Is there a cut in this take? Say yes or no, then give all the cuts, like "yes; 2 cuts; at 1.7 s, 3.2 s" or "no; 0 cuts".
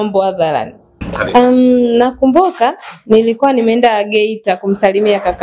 yes; 1 cut; at 1.0 s